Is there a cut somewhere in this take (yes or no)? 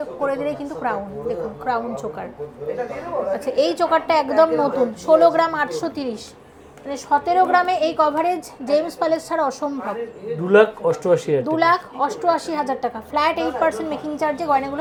no